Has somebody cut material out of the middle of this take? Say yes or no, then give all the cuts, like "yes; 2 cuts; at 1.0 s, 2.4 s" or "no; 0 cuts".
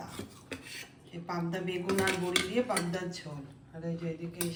no; 0 cuts